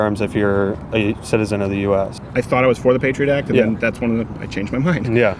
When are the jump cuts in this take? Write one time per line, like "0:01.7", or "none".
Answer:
0:02.2